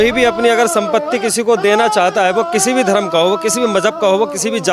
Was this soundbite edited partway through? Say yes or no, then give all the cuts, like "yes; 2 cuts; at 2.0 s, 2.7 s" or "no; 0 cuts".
no; 0 cuts